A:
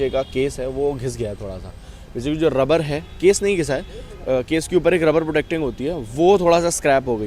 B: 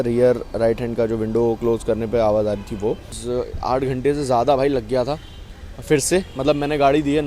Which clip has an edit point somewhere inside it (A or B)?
B